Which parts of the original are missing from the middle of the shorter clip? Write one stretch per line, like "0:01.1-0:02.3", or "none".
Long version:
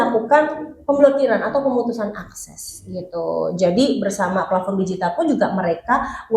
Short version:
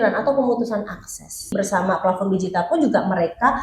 0:02.8-0:04.0